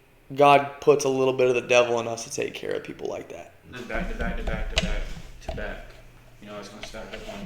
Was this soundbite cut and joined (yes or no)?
yes